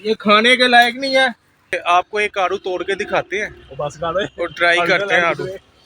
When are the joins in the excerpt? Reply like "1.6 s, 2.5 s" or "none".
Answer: 1.8 s